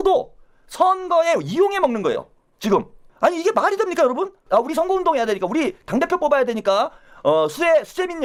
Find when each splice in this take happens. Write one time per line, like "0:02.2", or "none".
none